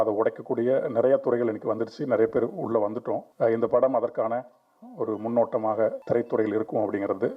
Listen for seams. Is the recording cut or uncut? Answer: cut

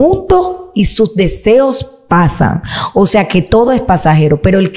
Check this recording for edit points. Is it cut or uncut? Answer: uncut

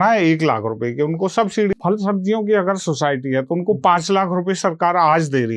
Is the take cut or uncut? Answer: cut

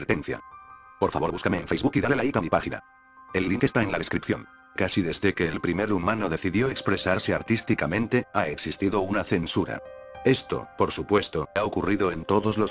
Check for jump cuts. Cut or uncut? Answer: cut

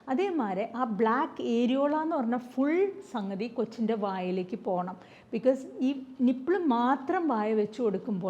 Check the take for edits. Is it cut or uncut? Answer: uncut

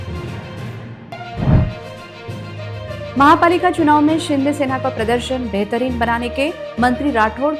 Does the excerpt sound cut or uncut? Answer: cut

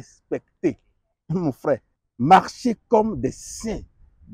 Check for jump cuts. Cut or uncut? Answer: cut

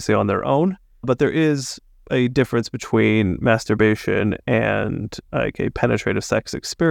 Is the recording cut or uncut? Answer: cut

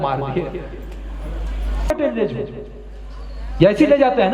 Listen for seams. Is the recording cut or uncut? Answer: cut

